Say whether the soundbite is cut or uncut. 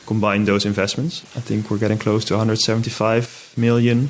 cut